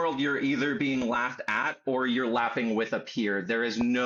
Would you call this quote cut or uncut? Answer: uncut